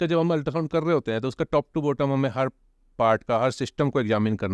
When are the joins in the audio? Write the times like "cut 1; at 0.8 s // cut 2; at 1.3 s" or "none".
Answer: none